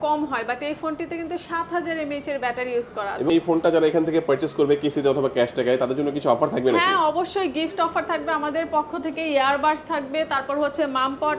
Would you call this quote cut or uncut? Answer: cut